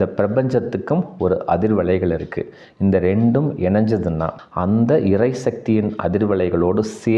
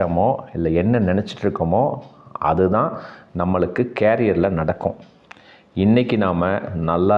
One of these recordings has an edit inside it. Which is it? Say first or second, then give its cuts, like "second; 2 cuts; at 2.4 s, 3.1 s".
first; 1 cut; at 4.3 s